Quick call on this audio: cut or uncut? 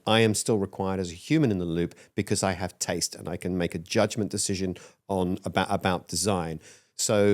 uncut